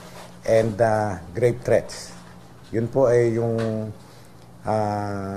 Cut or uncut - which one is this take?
cut